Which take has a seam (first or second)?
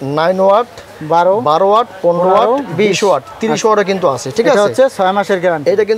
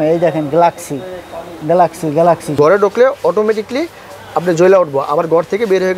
second